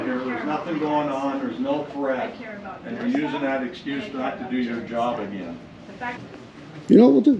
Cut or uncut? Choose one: cut